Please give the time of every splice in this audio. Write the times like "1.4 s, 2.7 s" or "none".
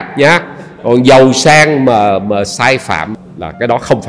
3.1 s